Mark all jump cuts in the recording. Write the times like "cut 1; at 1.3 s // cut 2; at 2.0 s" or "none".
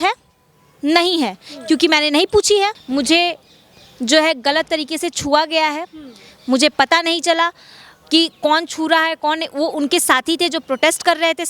cut 1; at 2.8 s